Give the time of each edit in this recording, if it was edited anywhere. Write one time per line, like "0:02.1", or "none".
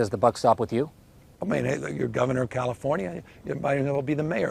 none